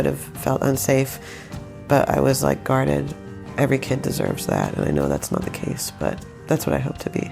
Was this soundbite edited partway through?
yes; 2 cuts; at 3.4 s, 6.3 s

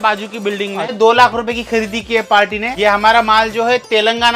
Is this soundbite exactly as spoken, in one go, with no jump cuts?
no; 2 cuts; at 0.9 s, 2.8 s

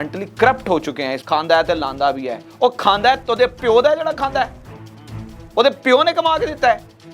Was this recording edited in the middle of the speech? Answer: yes; 1 cut; at 1.2 s

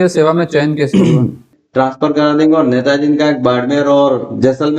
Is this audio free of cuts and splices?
no; 1 cut; at 1.5 s

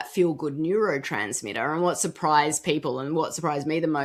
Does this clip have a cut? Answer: no; 0 cuts

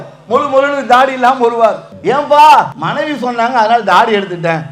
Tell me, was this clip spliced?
yes; 2 cuts; at 1.9 s, 2.8 s

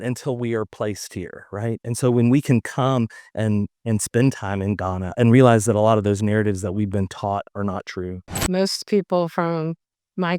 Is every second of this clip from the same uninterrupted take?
no; 2 cuts; at 5.1 s, 8.5 s

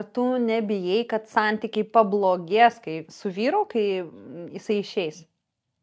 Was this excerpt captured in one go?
yes; 0 cuts

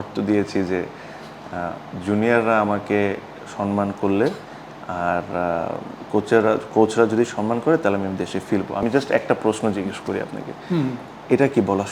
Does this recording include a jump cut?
no; 0 cuts

